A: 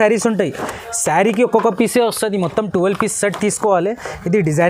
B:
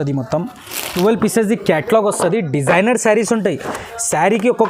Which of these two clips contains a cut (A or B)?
B